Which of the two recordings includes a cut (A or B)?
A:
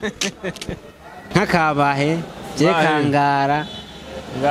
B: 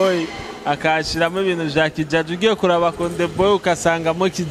A